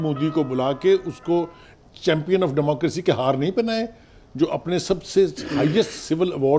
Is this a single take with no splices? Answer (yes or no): yes